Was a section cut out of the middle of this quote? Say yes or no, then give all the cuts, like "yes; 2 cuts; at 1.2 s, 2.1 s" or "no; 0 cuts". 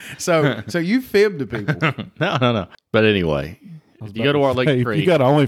yes; 1 cut; at 2.8 s